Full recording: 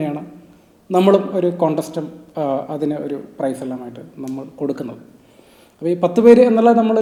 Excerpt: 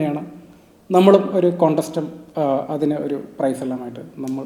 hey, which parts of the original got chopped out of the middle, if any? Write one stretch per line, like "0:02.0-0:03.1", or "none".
none

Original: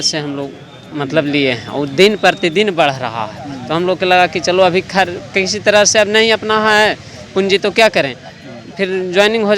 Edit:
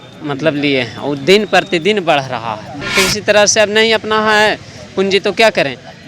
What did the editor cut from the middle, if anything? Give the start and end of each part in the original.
0:03.5-0:05.2

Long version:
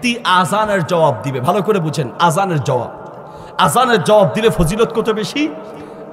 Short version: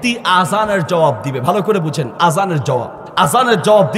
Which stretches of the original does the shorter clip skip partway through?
0:03.0-0:03.4

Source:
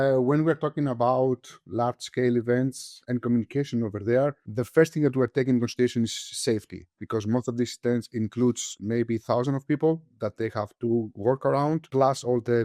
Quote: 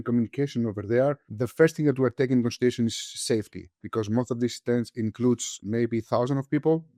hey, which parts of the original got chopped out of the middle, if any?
none

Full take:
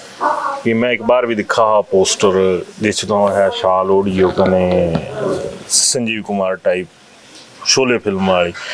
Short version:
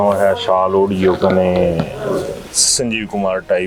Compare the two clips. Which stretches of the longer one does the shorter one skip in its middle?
none

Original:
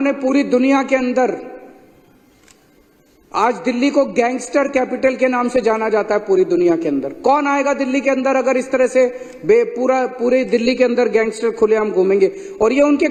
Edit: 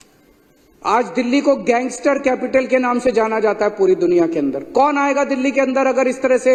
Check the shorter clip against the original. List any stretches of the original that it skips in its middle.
none

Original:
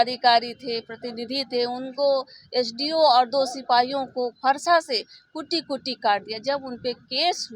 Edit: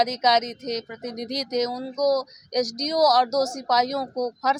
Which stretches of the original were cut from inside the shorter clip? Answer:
none

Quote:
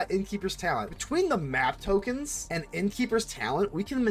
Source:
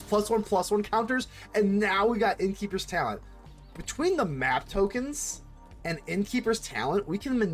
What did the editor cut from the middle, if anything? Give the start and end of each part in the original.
0:03.2-0:03.8
0:05.2-0:05.7

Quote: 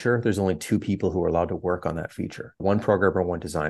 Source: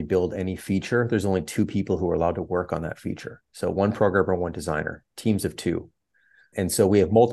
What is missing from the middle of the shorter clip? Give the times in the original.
0:03.5-0:03.7

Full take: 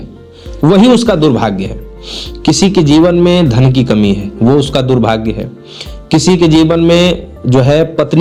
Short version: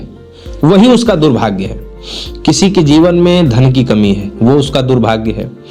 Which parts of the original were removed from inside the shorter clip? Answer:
none

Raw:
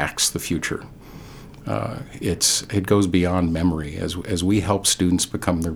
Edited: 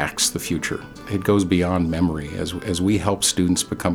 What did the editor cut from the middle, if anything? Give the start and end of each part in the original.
0:00.9-0:02.6

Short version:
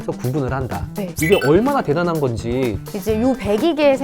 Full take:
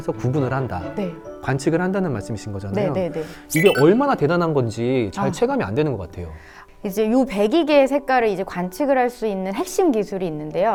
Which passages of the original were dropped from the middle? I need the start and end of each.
0:01.1-0:03.5
0:05.1-0:06.7

